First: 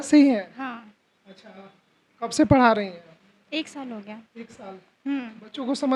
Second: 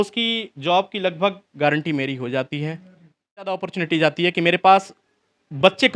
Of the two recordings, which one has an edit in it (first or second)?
second